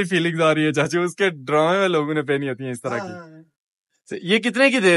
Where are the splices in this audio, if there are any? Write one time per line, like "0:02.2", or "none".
none